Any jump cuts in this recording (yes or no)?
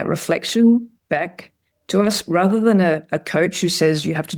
no